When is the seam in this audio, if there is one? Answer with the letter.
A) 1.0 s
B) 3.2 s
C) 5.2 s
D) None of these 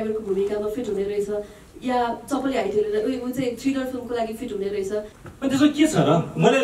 C